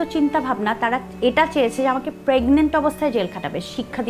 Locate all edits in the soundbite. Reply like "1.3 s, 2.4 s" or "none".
none

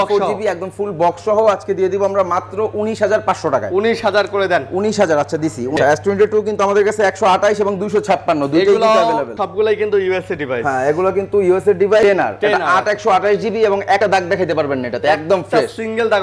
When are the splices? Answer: 5.8 s, 9.4 s, 12.0 s, 14.0 s

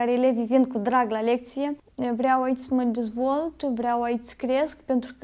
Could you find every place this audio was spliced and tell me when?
1.9 s

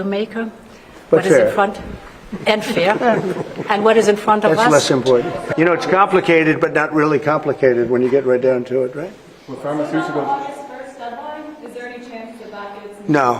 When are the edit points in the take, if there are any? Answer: 5.4 s

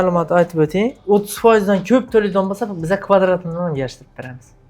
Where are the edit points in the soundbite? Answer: 1.0 s

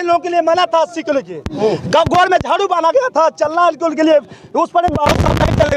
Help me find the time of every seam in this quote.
none

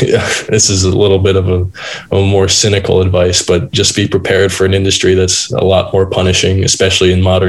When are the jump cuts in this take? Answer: none

